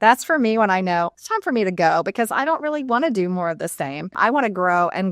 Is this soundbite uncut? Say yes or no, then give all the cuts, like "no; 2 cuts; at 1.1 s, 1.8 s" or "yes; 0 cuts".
no; 2 cuts; at 1.2 s, 4.1 s